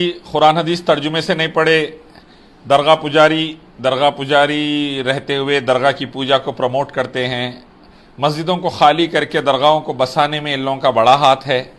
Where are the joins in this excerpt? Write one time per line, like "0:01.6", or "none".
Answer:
none